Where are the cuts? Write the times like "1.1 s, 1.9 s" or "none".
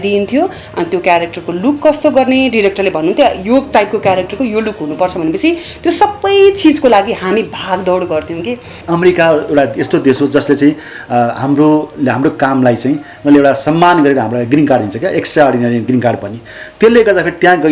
8.8 s

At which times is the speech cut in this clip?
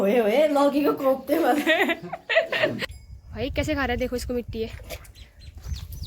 2.8 s

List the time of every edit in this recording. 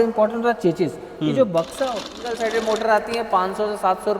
2.2 s

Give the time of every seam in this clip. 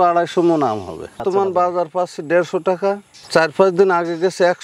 1.2 s

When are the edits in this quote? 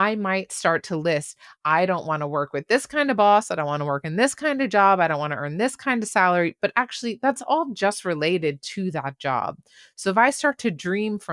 none

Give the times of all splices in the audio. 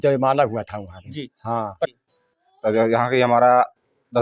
1.9 s

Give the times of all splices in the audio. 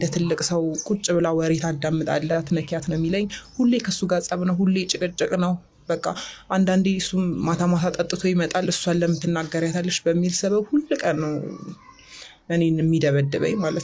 2.3 s

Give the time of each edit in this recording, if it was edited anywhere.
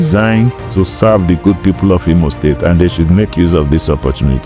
none

